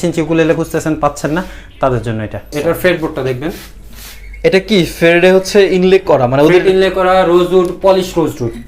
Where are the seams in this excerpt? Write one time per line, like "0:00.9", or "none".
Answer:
0:02.5